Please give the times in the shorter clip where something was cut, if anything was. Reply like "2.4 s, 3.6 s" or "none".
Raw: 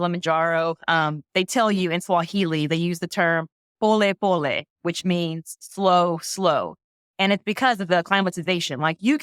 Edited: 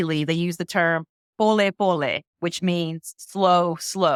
none